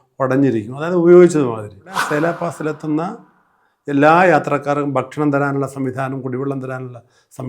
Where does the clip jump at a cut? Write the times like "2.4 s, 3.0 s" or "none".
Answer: 2.0 s

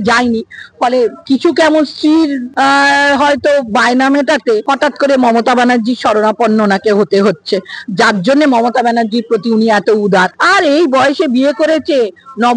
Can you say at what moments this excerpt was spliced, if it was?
1.2 s, 2.4 s, 4.6 s, 10.4 s

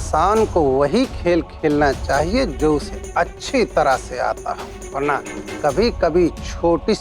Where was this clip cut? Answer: 4.8 s

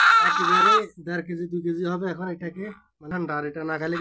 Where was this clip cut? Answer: 2.9 s

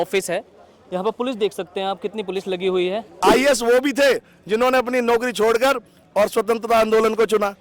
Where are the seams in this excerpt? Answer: 3.1 s

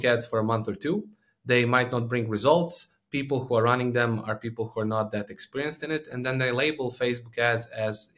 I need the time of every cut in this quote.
none

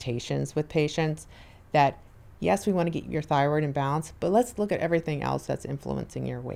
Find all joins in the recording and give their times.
none

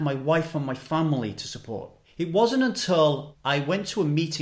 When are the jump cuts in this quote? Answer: 2.0 s, 3.3 s

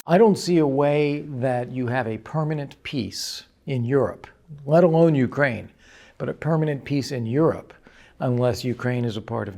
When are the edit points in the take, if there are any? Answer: none

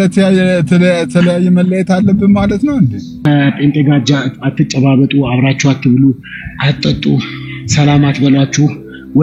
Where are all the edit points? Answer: 3.2 s

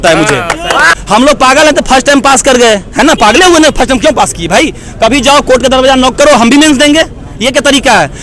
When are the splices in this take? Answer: 0.9 s

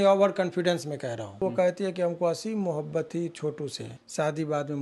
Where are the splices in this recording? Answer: 1.4 s, 3.9 s

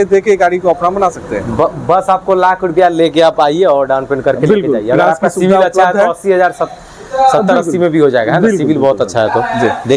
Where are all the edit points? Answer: none

